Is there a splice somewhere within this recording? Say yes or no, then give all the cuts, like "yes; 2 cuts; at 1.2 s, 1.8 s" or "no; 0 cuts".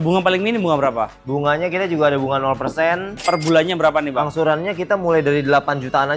yes; 1 cut; at 3.2 s